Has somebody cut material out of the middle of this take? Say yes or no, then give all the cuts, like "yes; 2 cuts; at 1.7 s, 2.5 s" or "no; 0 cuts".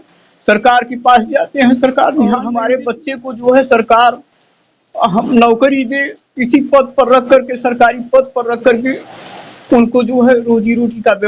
yes; 1 cut; at 2.6 s